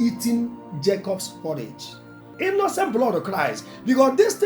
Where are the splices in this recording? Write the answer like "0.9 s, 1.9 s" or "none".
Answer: 2.3 s